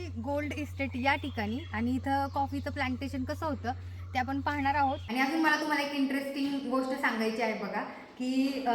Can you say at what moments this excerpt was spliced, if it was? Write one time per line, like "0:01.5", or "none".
0:05.0